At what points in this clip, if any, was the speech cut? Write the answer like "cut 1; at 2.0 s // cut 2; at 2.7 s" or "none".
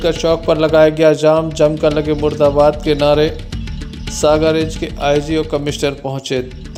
none